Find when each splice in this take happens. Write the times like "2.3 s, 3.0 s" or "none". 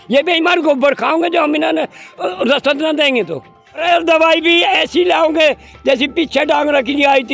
3.8 s